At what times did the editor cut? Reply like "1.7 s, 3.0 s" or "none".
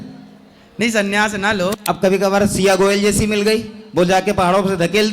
1.7 s